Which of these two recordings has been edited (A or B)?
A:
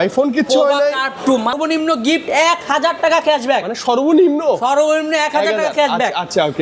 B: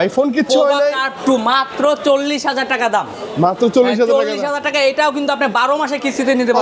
A